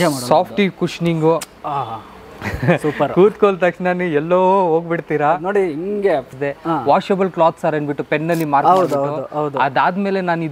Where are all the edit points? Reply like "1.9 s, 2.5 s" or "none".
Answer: 6.3 s